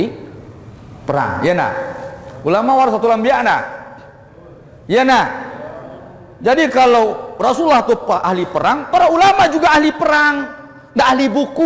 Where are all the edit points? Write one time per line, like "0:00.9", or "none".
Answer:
none